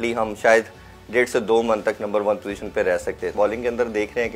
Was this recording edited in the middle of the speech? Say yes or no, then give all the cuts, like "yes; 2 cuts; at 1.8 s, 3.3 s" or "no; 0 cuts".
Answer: yes; 1 cut; at 3.3 s